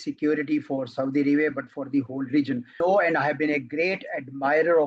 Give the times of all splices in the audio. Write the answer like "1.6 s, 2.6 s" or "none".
2.8 s